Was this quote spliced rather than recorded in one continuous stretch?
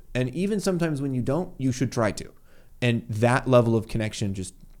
no; 0 cuts

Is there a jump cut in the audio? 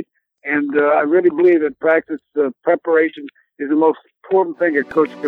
no; 0 cuts

